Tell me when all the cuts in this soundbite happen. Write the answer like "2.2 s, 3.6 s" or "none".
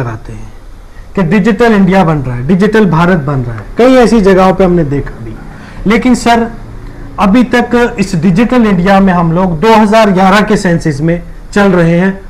none